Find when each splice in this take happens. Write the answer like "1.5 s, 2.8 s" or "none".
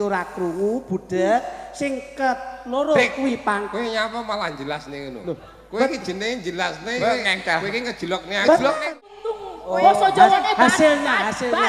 9.3 s

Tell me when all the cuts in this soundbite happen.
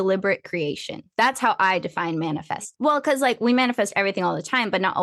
2.6 s

